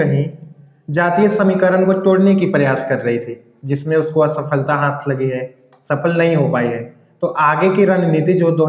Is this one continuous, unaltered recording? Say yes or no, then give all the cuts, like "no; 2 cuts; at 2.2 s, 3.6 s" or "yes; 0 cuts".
yes; 0 cuts